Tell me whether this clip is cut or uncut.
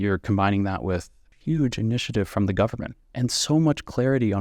cut